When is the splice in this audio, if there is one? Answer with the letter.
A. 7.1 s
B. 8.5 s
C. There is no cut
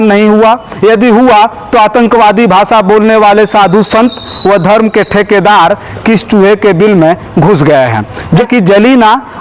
B